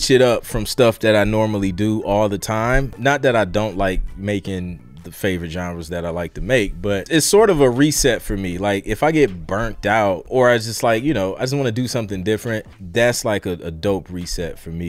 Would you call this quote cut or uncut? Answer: cut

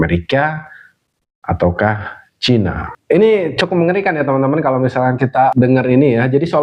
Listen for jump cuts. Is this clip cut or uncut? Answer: cut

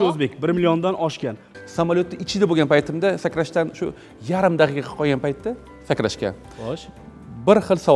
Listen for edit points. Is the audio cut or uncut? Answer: cut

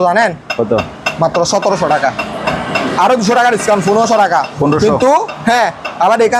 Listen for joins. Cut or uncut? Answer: uncut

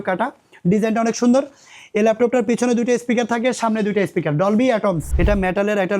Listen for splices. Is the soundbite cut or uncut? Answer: cut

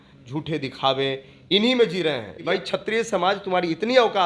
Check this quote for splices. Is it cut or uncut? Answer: cut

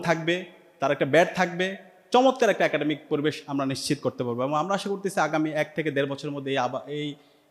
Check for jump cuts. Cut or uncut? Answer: uncut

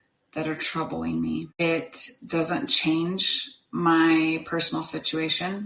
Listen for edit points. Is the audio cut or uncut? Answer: cut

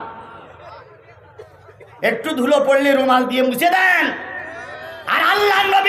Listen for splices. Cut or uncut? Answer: uncut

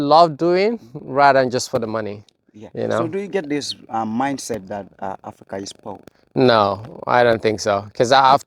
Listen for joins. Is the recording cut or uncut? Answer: uncut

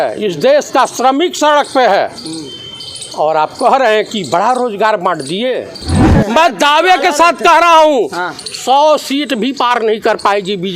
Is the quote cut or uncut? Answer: cut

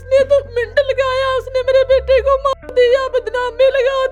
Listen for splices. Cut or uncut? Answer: uncut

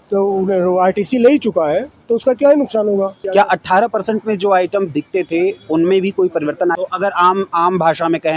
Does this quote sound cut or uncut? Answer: cut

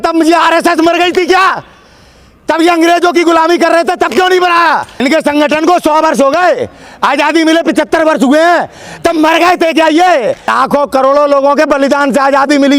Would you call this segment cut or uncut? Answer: cut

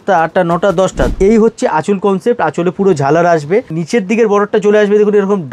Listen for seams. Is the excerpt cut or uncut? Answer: cut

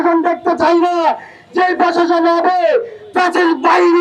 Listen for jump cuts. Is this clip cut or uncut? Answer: uncut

